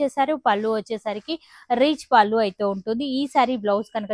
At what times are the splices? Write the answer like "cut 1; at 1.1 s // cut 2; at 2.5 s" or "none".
none